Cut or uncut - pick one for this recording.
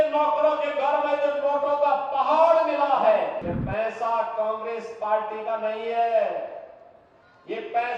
cut